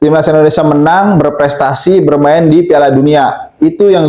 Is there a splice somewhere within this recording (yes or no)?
no